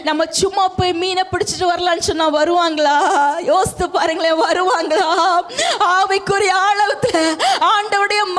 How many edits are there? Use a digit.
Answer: 0